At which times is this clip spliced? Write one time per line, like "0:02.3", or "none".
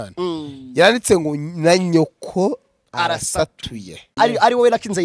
0:04.1